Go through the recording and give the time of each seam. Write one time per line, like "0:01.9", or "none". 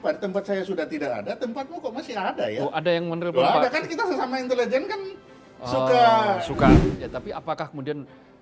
0:06.8